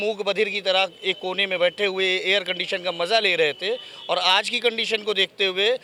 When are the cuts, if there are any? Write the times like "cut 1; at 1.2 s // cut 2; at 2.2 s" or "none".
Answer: none